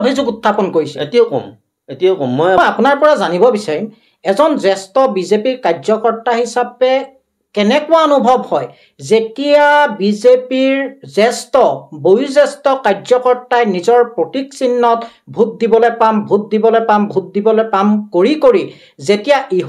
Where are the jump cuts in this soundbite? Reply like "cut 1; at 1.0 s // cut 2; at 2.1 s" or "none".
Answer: cut 1; at 2.6 s